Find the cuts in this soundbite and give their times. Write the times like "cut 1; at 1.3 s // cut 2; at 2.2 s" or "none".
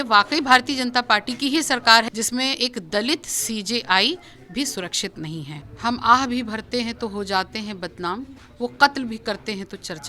cut 1; at 2.1 s // cut 2; at 5.6 s

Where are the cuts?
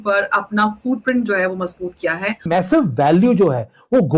cut 1; at 2.5 s

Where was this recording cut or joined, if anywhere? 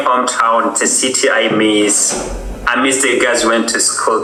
none

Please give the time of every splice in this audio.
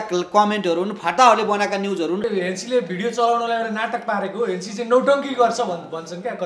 cut 1; at 2.3 s

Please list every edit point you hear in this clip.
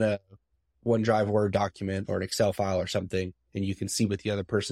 none

